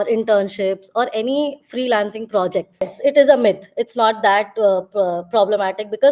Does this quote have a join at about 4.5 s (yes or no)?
no